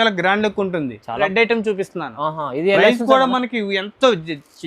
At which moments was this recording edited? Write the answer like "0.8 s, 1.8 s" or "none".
1.2 s